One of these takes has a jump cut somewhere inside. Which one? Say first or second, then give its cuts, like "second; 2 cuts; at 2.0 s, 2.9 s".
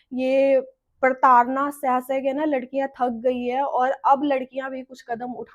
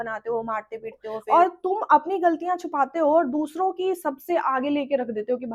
second; 1 cut; at 1.1 s